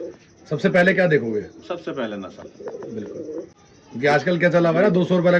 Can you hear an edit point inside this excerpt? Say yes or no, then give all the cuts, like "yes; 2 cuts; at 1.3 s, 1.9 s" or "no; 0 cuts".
no; 0 cuts